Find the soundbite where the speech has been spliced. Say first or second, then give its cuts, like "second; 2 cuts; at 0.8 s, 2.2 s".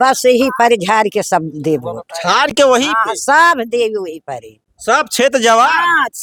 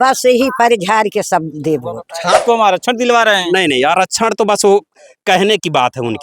second; 1 cut; at 2.4 s